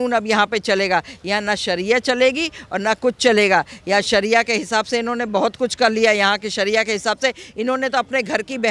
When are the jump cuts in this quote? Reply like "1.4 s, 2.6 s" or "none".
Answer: none